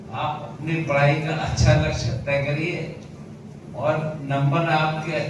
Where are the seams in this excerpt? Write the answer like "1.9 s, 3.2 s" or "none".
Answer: none